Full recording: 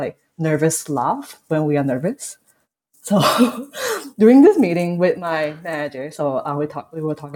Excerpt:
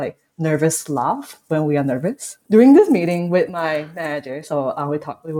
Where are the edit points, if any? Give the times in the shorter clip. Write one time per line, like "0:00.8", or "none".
0:02.3